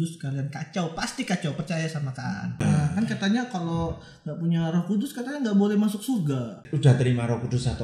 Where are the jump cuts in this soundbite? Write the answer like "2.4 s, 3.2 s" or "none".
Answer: 2.6 s, 6.7 s